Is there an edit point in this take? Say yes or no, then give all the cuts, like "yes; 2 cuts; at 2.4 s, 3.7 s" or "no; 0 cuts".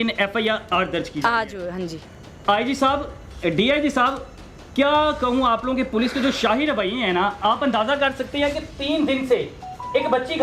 no; 0 cuts